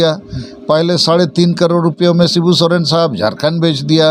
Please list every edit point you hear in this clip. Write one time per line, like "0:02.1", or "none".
none